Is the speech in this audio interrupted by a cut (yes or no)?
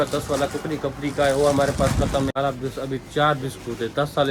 yes